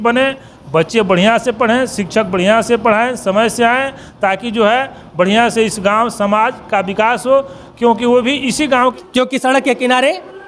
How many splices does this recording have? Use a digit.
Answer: 1